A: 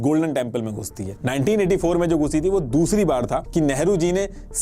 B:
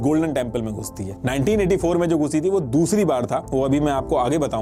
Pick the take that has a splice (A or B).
A